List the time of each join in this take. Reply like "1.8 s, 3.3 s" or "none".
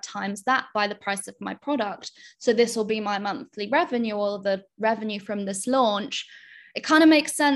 none